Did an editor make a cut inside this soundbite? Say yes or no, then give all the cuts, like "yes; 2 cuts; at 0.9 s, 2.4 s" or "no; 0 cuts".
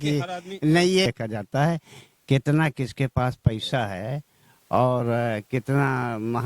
yes; 1 cut; at 1.1 s